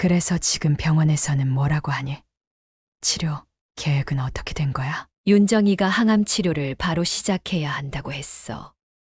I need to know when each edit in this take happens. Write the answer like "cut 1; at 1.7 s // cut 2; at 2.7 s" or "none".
cut 1; at 5.0 s